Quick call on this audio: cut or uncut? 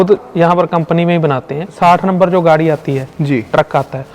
cut